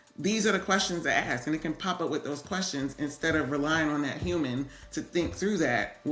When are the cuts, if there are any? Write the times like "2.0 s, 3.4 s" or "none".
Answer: none

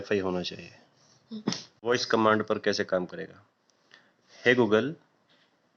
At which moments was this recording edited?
1.7 s

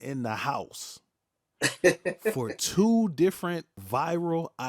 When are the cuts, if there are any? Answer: 3.8 s

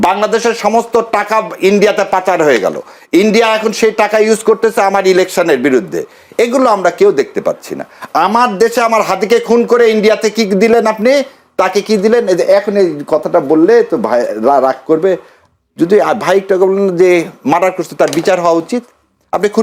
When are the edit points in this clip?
none

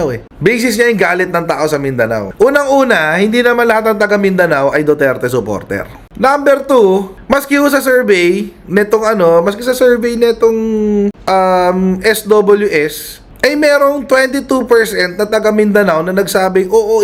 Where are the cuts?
none

